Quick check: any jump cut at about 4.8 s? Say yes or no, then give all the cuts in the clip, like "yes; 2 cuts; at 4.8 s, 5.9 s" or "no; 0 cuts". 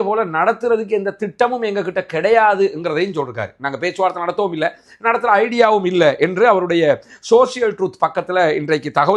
no; 0 cuts